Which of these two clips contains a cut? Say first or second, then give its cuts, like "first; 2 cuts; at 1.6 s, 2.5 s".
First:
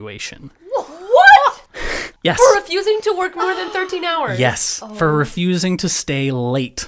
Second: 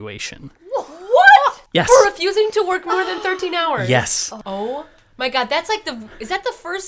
second; 2 cuts; at 1.6 s, 4.3 s